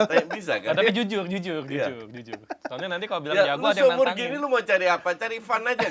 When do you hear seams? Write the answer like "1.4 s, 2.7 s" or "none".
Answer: none